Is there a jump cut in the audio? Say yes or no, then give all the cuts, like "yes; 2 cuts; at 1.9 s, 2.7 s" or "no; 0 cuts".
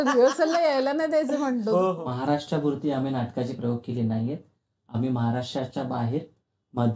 yes; 1 cut; at 2.0 s